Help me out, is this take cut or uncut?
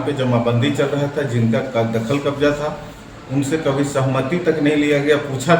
uncut